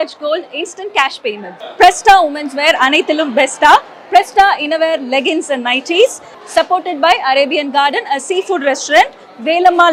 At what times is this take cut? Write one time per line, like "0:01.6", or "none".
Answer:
none